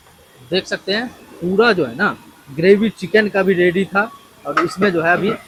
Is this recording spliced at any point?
no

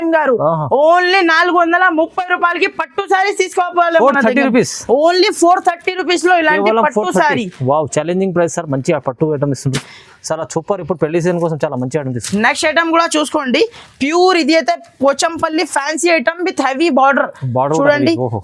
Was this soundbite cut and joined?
no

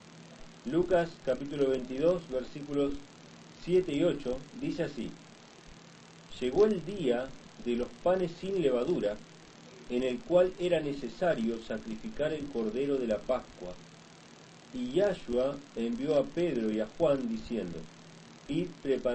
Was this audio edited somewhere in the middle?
no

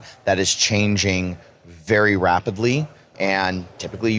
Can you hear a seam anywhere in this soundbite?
yes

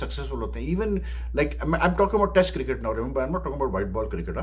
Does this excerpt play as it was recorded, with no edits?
yes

